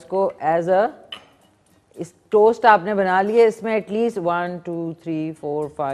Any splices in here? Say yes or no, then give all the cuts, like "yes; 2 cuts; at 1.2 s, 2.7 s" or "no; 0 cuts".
no; 0 cuts